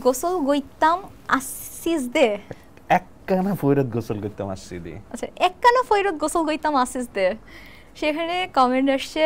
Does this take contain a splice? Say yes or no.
no